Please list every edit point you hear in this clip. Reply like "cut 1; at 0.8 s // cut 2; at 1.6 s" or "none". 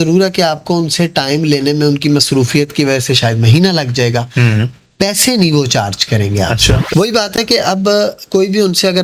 cut 1; at 6.8 s